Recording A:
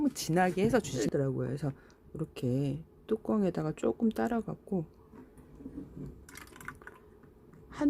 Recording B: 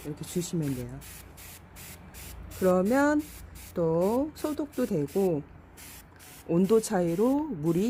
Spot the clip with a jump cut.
A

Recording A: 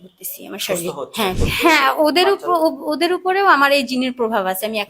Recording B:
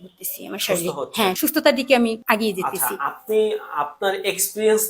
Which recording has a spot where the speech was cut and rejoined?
A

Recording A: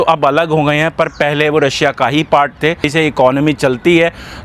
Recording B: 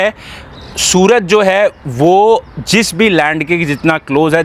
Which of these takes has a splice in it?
A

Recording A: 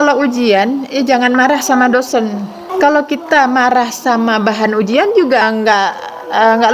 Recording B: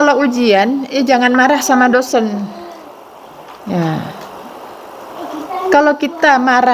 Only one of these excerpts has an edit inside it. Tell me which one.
A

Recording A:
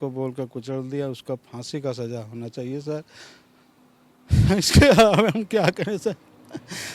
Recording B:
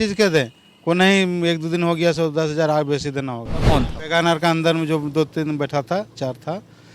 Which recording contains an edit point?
B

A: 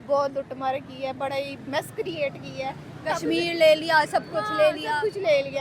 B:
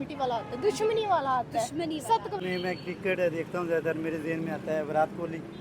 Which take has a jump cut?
B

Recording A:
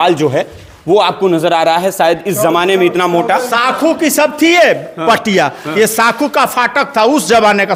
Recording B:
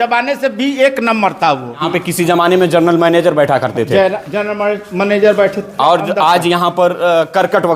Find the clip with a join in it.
B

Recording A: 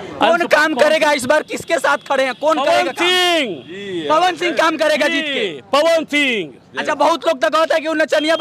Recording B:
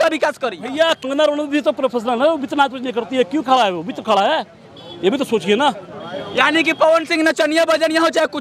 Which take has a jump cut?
B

